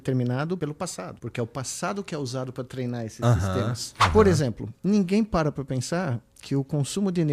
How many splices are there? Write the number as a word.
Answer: two